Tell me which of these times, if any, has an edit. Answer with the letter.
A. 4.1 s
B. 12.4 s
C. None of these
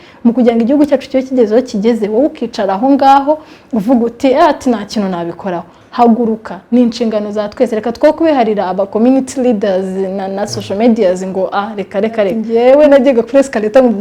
B